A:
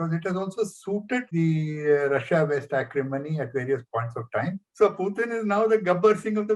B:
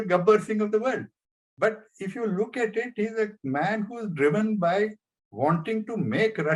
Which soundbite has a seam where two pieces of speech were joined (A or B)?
A